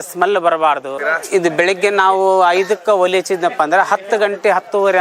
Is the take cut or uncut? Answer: cut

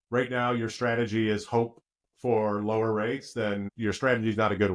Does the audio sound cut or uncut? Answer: cut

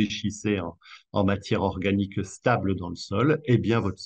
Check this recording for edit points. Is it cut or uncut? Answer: uncut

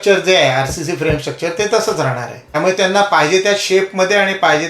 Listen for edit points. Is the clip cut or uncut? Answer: cut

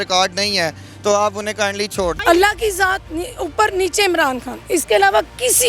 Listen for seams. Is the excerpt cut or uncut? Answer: cut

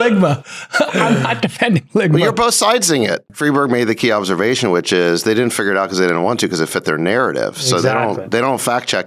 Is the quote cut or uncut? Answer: cut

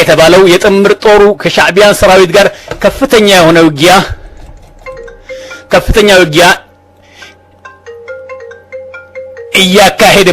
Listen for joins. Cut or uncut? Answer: cut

